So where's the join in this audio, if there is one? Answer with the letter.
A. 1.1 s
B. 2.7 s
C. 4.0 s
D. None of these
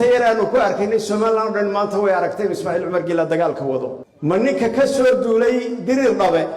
C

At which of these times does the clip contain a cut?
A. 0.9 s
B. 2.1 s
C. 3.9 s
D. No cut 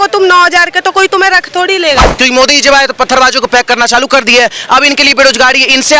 B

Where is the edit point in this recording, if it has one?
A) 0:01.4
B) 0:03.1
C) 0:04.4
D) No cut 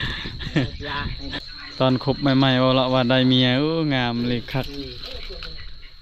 A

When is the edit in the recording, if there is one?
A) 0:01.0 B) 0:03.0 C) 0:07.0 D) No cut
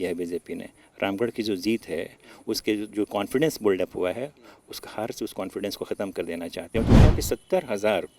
C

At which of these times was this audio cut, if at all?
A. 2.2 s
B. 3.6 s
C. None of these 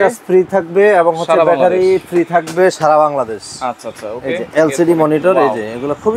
C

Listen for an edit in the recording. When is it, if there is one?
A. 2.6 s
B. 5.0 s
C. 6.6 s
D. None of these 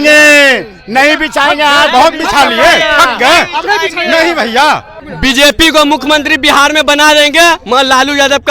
B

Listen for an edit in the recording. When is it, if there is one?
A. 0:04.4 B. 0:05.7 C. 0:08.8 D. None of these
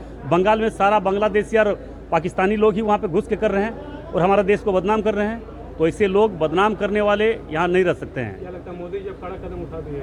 D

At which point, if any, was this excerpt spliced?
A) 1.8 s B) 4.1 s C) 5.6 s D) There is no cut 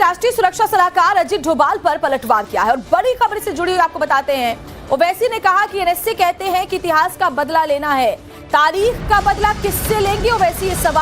A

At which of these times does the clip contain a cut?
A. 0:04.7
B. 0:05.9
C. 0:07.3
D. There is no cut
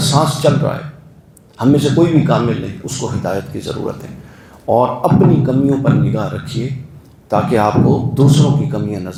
D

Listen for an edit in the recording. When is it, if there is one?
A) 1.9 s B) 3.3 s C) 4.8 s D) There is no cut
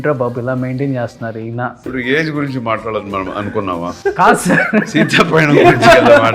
A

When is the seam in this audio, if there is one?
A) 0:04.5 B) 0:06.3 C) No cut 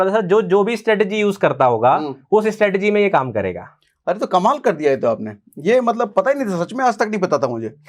C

